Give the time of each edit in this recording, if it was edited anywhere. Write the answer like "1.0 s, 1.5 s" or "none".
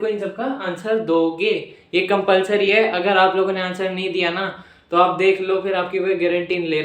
none